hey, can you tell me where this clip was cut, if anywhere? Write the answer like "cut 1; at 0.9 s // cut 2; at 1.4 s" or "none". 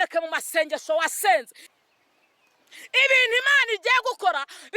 cut 1; at 1.6 s